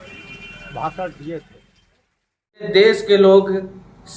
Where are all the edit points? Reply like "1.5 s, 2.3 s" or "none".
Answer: 2.7 s